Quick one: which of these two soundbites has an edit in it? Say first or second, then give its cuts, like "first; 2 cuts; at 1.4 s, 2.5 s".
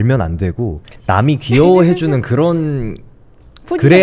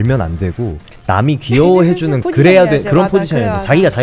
second; 1 cut; at 2.2 s